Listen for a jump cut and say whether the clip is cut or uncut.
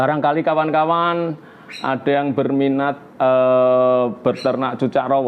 uncut